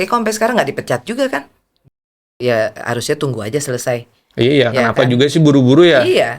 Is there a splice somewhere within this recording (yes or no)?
yes